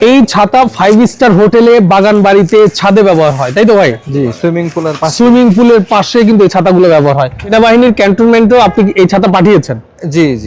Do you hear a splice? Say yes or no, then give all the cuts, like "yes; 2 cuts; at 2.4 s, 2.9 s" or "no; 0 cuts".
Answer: yes; 1 cut; at 7.4 s